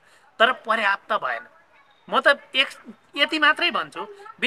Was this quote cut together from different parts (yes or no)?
no